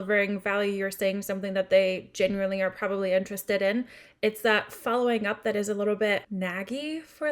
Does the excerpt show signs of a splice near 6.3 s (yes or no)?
yes